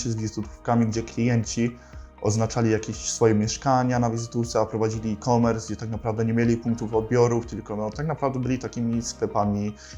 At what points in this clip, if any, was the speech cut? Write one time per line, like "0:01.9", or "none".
none